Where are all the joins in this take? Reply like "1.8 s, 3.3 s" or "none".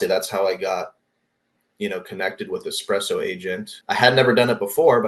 3.7 s